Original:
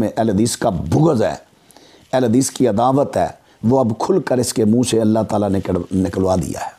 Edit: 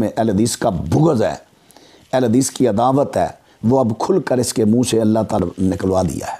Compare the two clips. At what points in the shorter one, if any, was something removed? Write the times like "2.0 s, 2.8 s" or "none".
5.4 s